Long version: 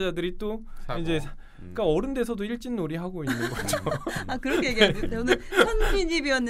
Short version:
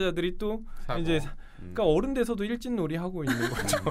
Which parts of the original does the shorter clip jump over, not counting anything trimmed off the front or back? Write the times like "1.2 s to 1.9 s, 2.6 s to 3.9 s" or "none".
none